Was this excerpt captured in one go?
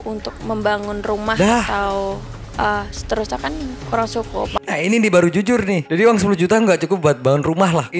yes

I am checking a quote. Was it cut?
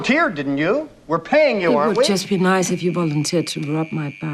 yes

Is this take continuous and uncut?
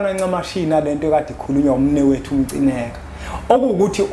yes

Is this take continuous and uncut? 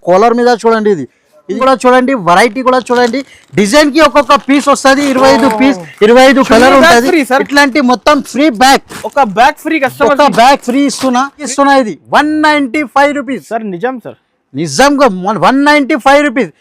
no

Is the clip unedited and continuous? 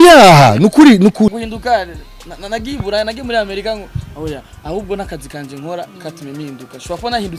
no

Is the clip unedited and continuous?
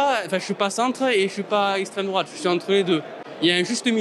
yes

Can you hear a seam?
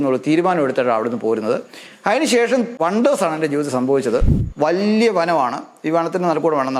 yes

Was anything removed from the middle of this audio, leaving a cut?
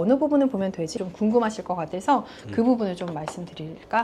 yes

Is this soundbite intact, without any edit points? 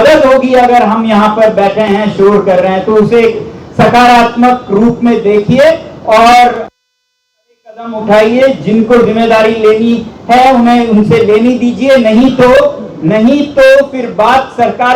yes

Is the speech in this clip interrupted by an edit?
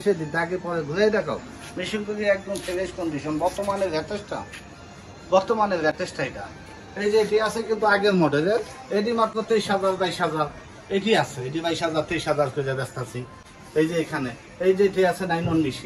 no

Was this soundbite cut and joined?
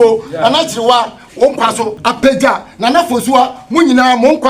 yes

